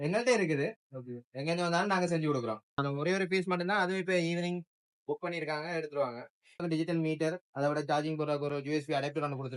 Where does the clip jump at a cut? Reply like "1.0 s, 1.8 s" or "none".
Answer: 2.8 s, 6.6 s